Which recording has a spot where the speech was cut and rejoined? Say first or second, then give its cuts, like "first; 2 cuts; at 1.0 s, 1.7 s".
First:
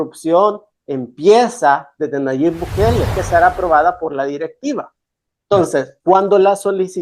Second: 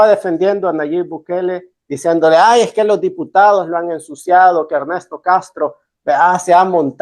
first; 1 cut; at 3.2 s